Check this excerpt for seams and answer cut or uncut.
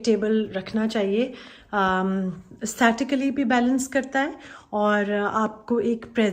uncut